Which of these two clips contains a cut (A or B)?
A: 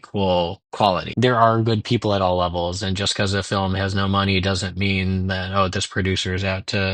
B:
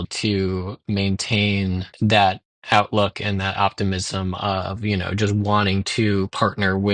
A